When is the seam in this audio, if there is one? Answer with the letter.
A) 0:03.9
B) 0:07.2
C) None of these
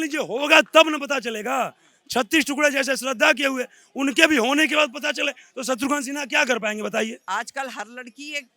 B